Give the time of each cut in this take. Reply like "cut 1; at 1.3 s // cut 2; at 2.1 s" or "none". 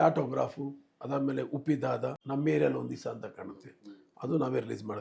cut 1; at 2.2 s